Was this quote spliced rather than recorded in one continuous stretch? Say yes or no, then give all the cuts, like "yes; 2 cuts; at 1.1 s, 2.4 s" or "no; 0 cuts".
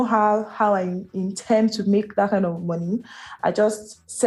no; 0 cuts